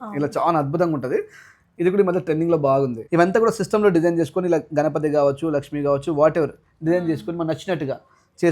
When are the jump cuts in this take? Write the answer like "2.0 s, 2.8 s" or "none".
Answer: 3.0 s